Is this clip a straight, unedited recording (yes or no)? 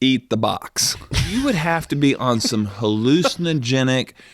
no